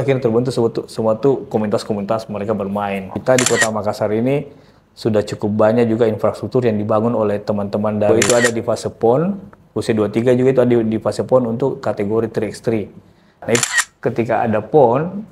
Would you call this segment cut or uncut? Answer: cut